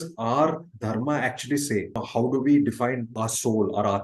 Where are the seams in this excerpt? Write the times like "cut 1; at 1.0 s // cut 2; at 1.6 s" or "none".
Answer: cut 1; at 2.0 s // cut 2; at 3.1 s

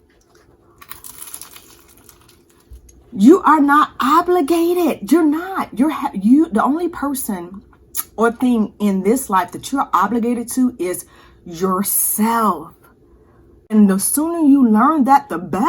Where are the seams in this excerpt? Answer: cut 1; at 2.8 s // cut 2; at 13.7 s

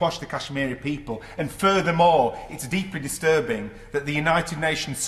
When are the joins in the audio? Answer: none

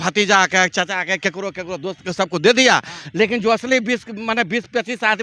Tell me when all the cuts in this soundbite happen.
none

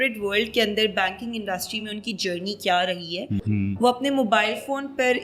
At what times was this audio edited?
cut 1; at 3.4 s

